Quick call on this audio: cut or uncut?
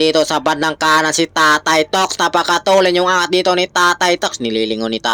uncut